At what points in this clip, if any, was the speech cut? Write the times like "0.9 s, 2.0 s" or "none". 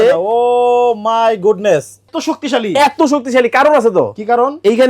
2.1 s